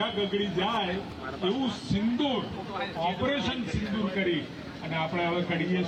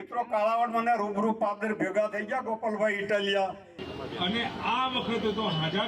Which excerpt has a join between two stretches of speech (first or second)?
second